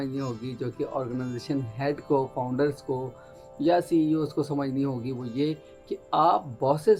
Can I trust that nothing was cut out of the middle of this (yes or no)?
yes